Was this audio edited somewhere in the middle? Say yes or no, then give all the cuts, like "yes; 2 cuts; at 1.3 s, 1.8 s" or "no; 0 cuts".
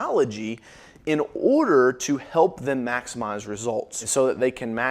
yes; 1 cut; at 4.0 s